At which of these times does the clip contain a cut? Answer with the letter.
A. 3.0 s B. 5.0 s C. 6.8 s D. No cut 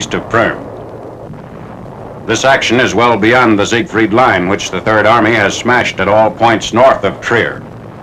D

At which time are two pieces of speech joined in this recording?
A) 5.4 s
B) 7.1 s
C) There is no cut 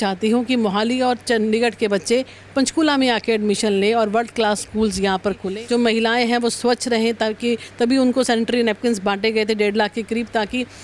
A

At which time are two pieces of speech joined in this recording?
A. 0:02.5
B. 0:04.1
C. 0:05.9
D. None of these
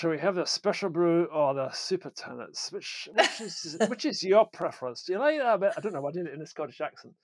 D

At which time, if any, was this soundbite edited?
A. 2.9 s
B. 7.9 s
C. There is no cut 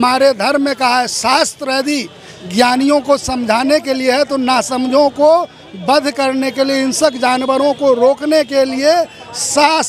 C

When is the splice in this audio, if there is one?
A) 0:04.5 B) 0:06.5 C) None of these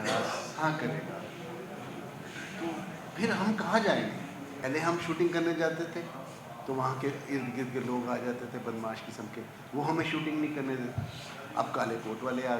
A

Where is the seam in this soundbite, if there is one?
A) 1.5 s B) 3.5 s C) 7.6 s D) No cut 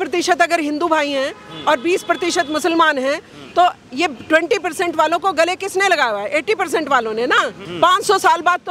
C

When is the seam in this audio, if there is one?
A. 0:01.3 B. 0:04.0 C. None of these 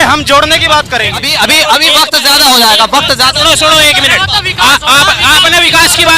A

